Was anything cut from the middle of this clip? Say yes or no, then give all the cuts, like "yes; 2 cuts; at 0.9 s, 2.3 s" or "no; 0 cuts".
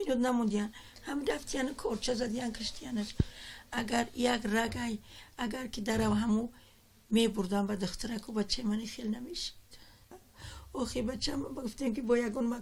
yes; 1 cut; at 4.1 s